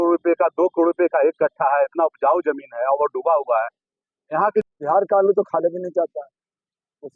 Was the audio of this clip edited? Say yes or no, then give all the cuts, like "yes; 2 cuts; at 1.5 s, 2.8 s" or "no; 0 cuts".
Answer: yes; 1 cut; at 4.6 s